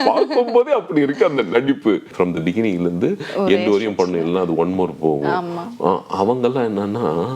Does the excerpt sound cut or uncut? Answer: cut